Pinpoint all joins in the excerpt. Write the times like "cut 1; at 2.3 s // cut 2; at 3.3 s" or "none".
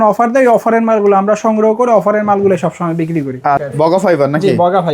cut 1; at 3.6 s